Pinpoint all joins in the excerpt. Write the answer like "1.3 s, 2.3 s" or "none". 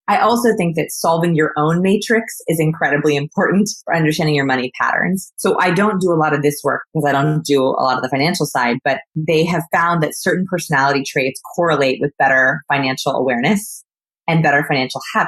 none